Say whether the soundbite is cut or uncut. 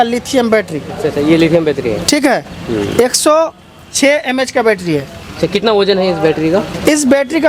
uncut